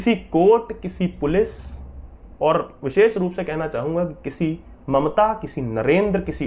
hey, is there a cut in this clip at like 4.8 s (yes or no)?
no